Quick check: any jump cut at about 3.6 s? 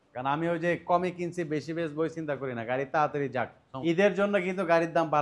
yes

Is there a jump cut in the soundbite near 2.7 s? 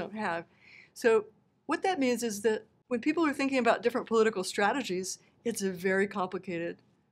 yes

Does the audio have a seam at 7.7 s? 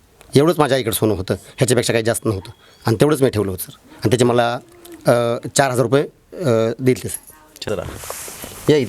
yes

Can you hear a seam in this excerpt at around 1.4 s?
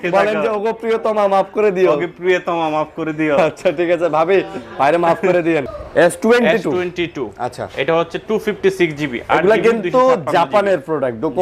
no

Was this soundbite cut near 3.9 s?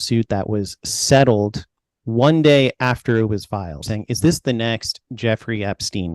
yes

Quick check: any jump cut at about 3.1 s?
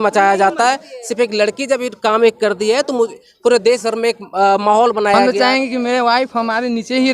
no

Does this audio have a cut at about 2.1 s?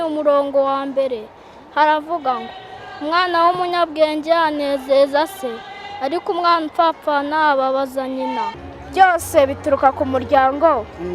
no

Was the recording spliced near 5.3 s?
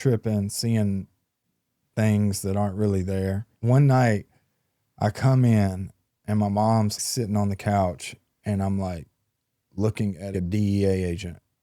no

